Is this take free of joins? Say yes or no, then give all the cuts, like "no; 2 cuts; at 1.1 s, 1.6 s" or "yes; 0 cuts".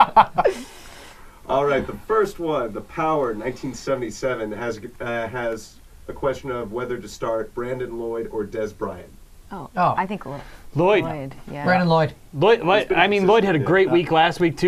yes; 0 cuts